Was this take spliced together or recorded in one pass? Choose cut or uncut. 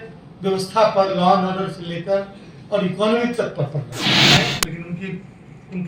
cut